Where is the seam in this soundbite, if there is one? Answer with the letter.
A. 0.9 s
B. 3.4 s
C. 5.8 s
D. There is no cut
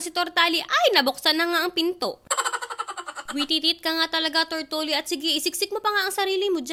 D